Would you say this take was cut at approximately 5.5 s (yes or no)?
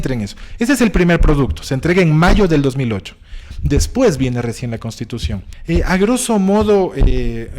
yes